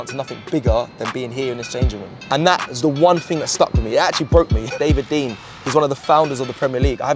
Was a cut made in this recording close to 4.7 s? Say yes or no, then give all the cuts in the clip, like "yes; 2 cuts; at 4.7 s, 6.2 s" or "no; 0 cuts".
yes; 2 cuts; at 2.2 s, 4.7 s